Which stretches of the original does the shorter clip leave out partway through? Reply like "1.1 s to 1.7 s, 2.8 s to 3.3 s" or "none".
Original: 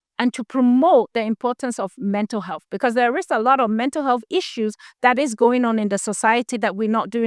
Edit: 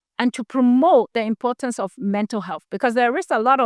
none